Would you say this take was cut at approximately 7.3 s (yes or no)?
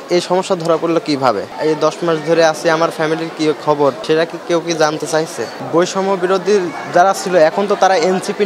no